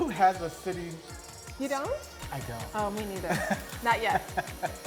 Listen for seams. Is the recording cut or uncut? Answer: uncut